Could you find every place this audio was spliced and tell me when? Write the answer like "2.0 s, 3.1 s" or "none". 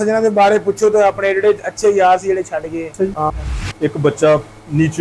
3.3 s